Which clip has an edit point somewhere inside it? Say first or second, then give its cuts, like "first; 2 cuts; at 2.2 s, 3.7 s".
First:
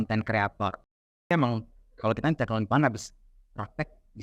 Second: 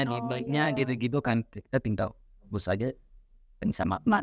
first; 1 cut; at 1.3 s